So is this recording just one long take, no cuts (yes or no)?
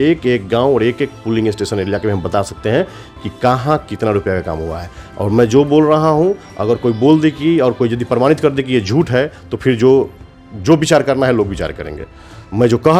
yes